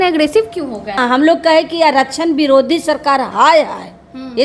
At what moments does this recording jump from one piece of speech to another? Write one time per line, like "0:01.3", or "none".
0:01.0